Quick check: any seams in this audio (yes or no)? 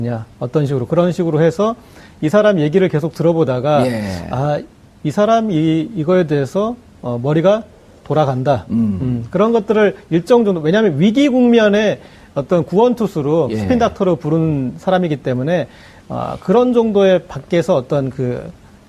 no